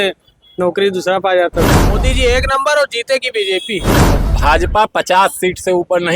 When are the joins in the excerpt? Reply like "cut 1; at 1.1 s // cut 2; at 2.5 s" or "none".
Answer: cut 1; at 1.8 s // cut 2; at 3.9 s